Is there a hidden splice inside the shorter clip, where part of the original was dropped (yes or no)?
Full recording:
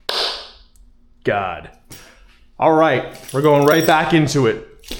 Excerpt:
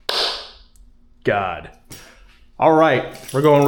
no